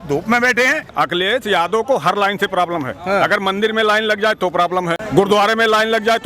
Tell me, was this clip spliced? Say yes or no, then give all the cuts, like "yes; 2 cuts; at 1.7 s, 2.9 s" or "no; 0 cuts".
yes; 2 cuts; at 0.9 s, 5.0 s